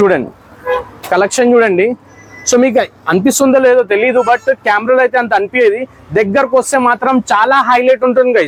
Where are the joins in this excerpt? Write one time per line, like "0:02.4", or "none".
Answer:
none